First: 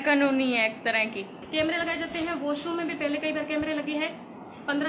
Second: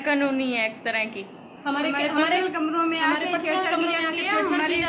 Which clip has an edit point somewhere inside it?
first; 1 cut; at 1.3 s

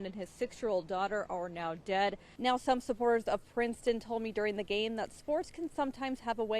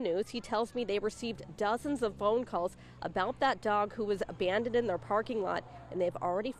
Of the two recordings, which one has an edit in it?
first; 1 cut; at 2.3 s

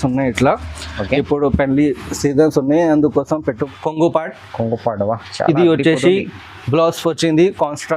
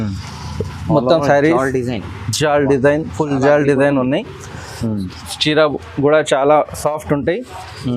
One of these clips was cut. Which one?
first; 1 cut; at 3.6 s

